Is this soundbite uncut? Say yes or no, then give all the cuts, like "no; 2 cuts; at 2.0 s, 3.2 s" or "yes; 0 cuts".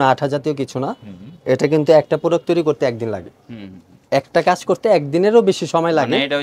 yes; 0 cuts